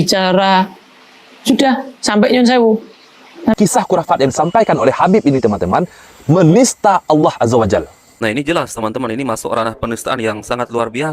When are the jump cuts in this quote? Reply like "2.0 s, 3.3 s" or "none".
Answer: 3.5 s, 8.1 s